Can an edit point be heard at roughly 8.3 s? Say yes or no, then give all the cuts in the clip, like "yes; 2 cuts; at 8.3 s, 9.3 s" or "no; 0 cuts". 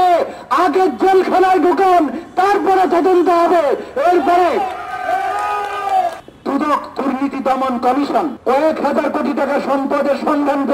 yes; 2 cuts; at 6.3 s, 8.3 s